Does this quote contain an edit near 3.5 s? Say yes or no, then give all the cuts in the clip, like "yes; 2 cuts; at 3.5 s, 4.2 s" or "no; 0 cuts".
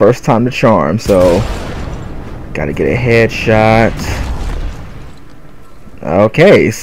no; 1 cut; at 1.0 s